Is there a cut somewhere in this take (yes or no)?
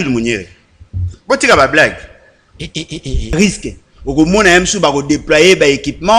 yes